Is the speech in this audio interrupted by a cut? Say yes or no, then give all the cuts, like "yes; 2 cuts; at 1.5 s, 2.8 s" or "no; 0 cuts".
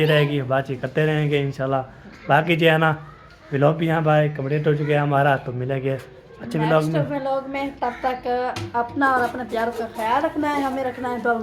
no; 0 cuts